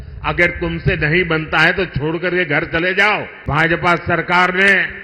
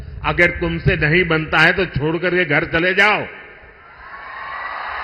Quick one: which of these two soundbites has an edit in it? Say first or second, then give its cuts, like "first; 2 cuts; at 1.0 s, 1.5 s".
first; 1 cut; at 3.4 s